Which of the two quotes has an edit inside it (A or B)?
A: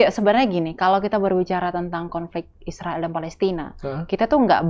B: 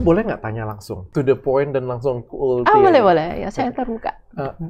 B